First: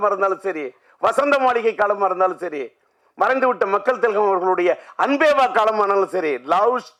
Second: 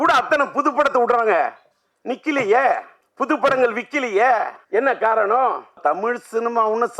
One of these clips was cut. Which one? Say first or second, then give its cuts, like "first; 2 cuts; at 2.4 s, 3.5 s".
second; 3 cuts; at 3.0 s, 4.6 s, 5.8 s